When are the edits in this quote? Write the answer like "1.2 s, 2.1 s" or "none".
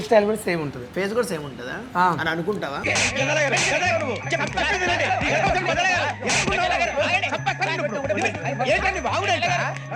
none